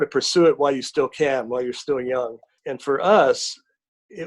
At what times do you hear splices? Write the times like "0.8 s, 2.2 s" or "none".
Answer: 2.5 s

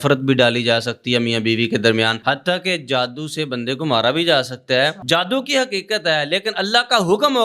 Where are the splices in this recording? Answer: 2.2 s, 5.0 s

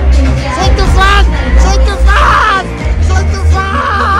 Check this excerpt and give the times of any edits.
none

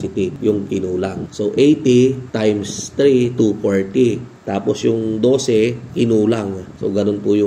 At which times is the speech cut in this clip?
1.2 s

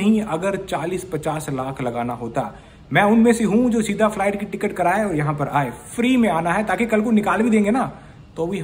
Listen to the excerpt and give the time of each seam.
none

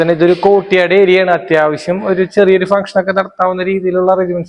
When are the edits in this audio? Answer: none

